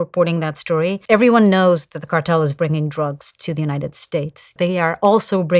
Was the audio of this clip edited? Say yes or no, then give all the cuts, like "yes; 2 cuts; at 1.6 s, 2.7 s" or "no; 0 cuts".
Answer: yes; 2 cuts; at 1.0 s, 4.4 s